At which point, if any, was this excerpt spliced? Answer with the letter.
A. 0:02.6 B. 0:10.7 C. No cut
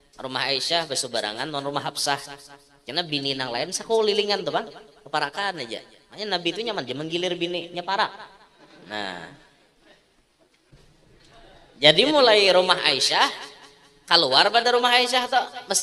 B